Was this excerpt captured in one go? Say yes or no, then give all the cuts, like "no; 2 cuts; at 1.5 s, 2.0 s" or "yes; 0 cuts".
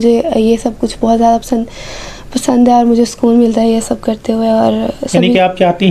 yes; 0 cuts